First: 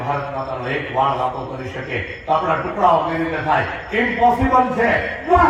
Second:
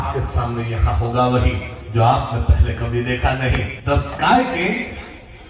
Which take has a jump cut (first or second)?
second